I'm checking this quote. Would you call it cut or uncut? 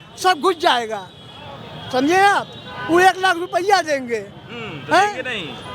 uncut